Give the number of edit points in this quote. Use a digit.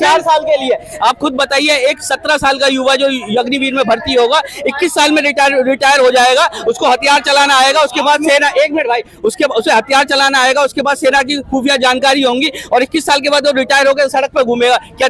0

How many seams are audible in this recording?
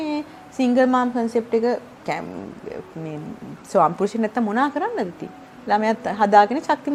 0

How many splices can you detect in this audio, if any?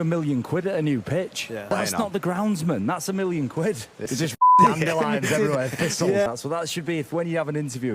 2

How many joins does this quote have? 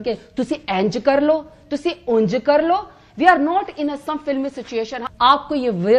1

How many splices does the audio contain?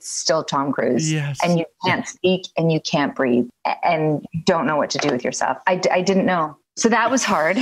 2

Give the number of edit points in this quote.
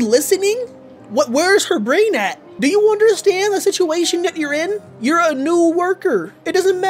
1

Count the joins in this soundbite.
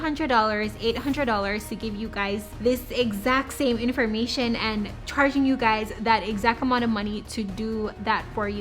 2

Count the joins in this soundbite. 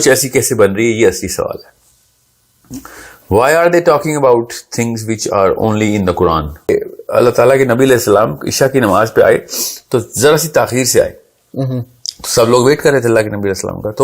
1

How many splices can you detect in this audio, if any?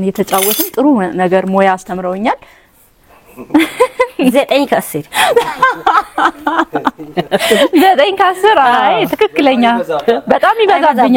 1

